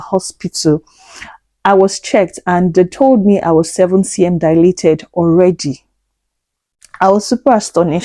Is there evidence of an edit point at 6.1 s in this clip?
no; 0 cuts

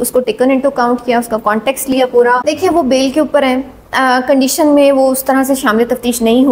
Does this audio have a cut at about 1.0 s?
no; 1 cut; at 2.5 s

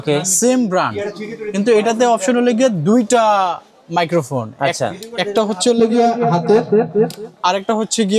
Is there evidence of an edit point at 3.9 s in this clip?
no; 0 cuts

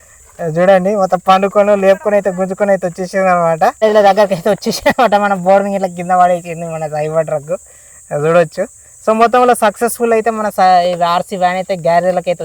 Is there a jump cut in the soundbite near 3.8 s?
no; 0 cuts

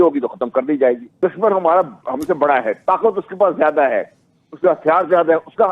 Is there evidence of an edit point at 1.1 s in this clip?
yes; 1 cut; at 1.1 s

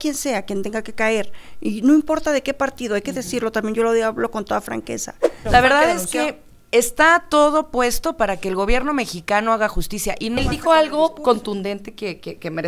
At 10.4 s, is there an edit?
yes; 2 cuts; at 5.3 s, 10.4 s

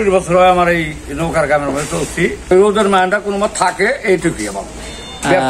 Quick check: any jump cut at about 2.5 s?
yes; 1 cut; at 2.5 s

